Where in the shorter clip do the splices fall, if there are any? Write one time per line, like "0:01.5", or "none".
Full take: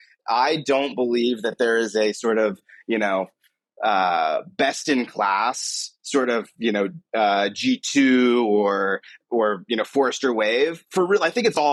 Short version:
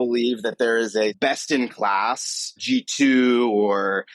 0:01.2
0:02.6